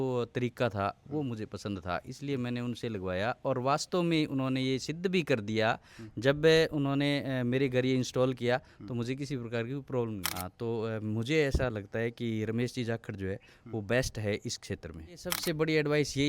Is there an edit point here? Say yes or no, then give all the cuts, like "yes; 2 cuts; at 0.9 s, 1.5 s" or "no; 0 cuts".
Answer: yes; 2 cuts; at 10.3 s, 15.3 s